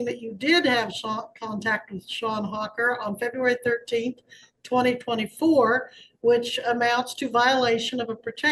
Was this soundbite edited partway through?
no; 0 cuts

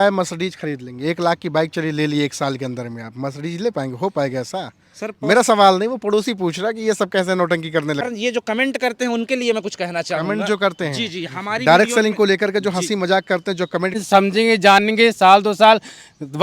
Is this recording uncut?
no; 2 cuts; at 8.0 s, 14.0 s

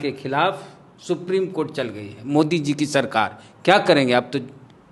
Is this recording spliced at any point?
no; 0 cuts

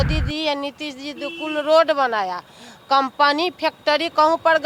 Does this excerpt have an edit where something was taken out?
no; 0 cuts

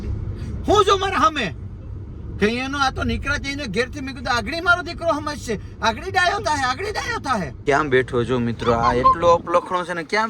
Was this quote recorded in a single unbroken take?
no; 1 cut; at 7.6 s

